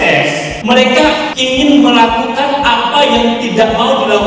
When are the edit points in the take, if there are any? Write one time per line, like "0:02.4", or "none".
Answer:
none